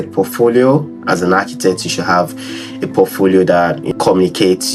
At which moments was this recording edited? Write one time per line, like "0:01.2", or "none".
0:03.8